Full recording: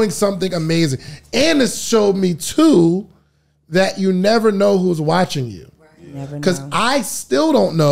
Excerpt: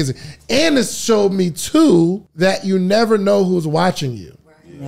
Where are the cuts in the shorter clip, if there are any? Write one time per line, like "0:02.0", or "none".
0:02.2